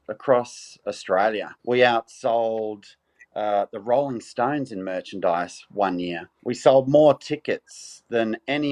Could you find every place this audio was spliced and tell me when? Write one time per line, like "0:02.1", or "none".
0:01.5
0:06.3